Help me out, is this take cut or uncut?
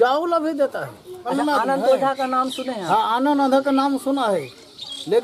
cut